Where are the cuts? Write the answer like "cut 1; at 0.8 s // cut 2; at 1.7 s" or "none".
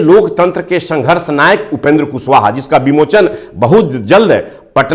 none